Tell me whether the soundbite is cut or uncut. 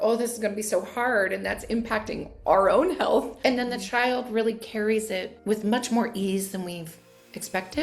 cut